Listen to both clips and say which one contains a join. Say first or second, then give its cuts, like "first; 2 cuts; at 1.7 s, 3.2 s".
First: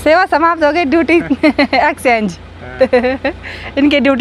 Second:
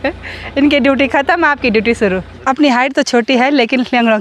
second; 1 cut; at 2.3 s